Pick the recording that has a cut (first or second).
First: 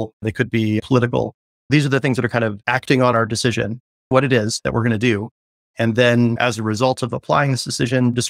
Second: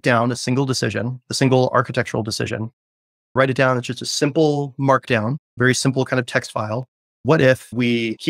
second